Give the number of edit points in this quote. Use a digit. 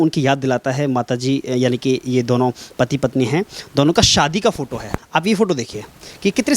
1